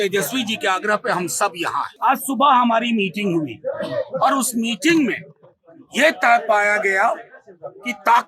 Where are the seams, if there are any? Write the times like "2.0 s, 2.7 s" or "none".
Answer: 1.9 s